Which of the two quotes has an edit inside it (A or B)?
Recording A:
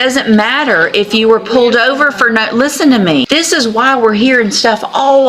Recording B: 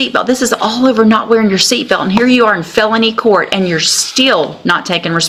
A